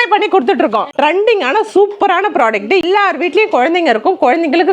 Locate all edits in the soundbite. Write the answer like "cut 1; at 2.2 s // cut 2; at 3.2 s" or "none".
cut 1; at 0.9 s // cut 2; at 2.8 s